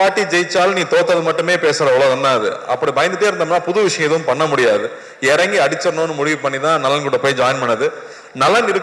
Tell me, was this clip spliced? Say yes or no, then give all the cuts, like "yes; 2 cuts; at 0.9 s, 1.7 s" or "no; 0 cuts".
no; 0 cuts